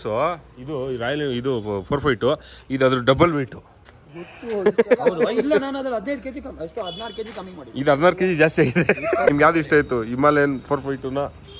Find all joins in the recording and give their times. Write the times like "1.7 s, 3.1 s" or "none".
9.3 s